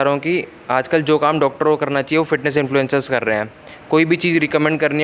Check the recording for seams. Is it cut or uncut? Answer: uncut